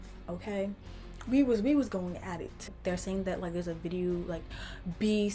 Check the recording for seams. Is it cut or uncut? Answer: cut